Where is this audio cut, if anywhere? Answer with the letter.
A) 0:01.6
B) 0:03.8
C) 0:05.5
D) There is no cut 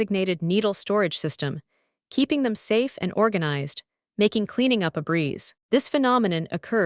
C